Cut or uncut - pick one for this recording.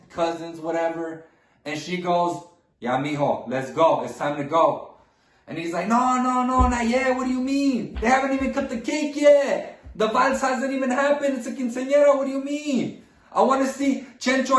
uncut